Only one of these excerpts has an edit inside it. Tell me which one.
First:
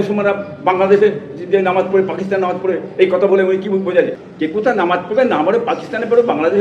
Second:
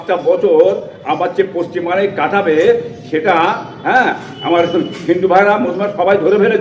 first; 1 cut; at 4.2 s

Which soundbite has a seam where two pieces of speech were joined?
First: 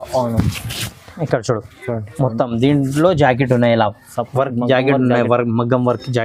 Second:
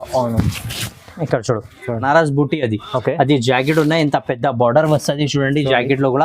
second; 1 cut; at 2.0 s

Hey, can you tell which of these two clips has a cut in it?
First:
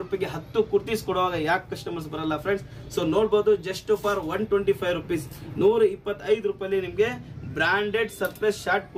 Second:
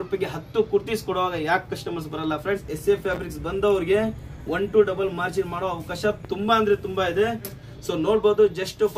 second; 2 cuts; at 2.7 s, 7.6 s

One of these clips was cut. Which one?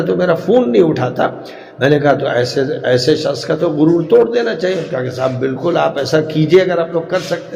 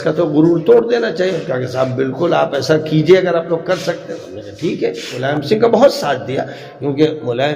second; 1 cut; at 5.2 s

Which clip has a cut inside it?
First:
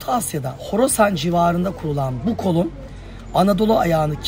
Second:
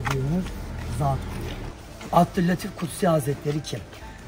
second; 1 cut; at 1.7 s

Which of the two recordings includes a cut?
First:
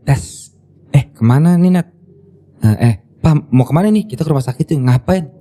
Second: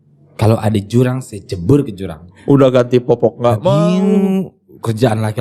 second; 1 cut; at 2.3 s

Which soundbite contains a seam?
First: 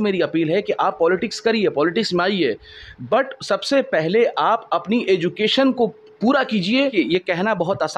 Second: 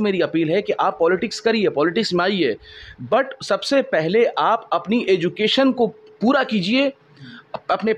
first; 1 cut; at 6.9 s

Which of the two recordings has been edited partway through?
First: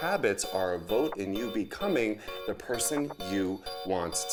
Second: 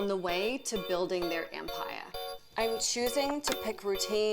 second; 1 cut; at 2.0 s

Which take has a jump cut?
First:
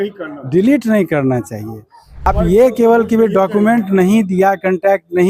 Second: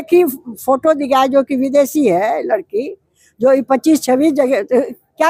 first; 1 cut; at 2.3 s

